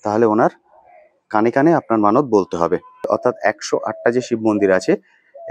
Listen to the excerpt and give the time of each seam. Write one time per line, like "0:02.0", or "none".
0:03.1